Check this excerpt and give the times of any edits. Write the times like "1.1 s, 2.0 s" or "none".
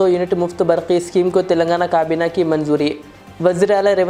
none